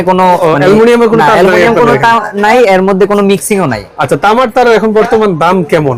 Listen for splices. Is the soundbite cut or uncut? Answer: uncut